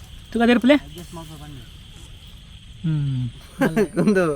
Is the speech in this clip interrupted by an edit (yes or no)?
yes